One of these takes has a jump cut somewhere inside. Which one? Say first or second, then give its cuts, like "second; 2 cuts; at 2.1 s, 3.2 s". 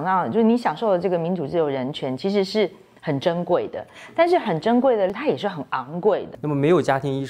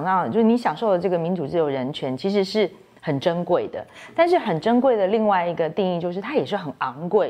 first; 2 cuts; at 5.1 s, 6.3 s